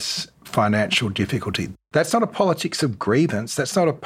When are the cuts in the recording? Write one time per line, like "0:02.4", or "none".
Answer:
0:01.6